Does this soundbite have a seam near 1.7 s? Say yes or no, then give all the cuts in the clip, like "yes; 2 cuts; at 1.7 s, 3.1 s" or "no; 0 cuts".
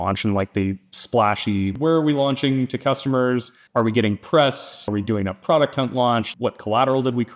yes; 4 cuts; at 1.7 s, 3.6 s, 4.9 s, 6.3 s